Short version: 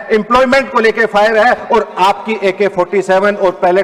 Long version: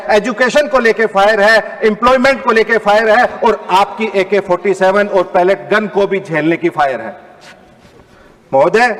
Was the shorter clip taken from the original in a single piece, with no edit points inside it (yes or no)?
yes